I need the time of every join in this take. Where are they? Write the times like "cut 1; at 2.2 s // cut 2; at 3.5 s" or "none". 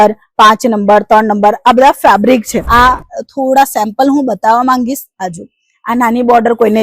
cut 1; at 2.6 s